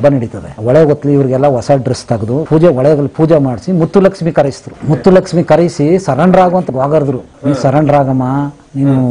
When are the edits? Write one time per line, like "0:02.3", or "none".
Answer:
0:02.4
0:04.7
0:06.7